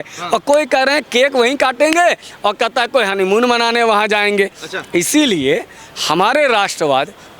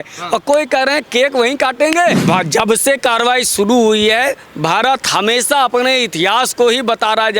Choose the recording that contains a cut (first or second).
second